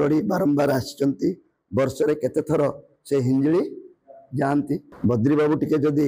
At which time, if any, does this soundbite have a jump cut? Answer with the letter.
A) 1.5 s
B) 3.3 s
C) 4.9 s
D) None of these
C